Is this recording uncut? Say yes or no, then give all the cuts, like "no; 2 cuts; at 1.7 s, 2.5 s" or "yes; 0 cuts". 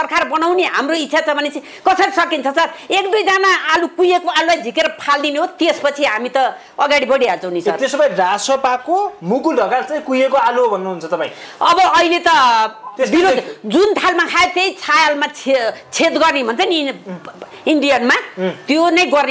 yes; 0 cuts